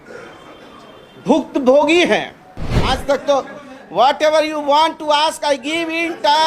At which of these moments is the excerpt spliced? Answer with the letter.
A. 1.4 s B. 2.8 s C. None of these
B